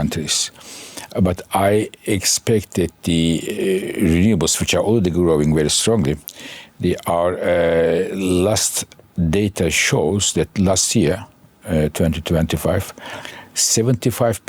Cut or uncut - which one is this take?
uncut